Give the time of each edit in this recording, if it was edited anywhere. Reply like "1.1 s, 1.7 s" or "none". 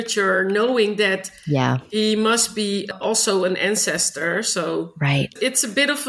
none